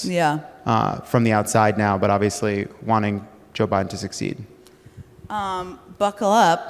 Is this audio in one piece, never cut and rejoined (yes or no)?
yes